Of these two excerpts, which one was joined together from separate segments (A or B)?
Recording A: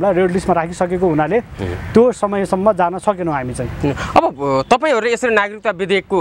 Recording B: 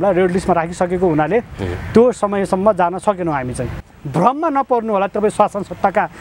B